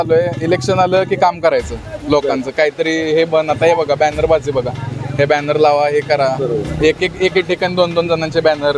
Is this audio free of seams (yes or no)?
yes